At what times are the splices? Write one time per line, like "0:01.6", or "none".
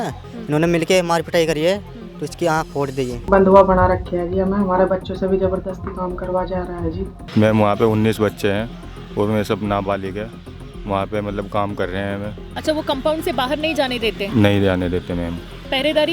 0:03.2
0:07.2
0:12.5